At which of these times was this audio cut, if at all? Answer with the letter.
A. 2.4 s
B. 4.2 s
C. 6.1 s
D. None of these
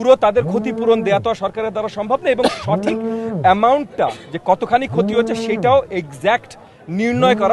D